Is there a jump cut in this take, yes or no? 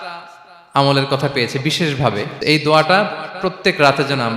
yes